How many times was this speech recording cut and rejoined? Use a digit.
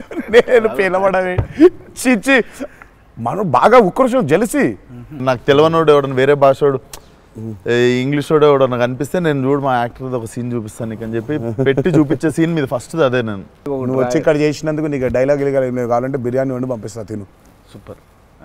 2